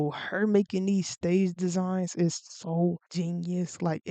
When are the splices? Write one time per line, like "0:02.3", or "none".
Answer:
none